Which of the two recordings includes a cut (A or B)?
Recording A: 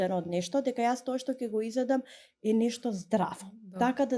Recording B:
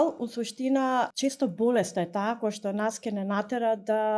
B